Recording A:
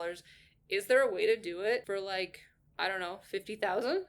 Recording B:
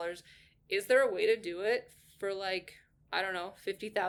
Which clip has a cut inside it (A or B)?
A